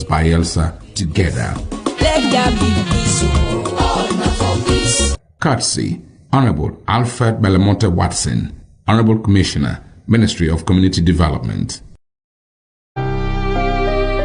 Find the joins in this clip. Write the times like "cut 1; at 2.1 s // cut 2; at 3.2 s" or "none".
cut 1; at 13.0 s